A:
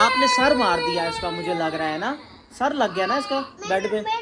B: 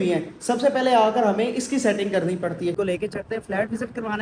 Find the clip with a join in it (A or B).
B